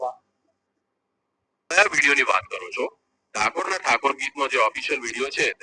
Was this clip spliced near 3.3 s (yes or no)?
no